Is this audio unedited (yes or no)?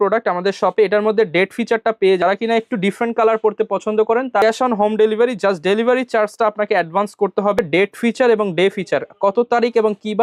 no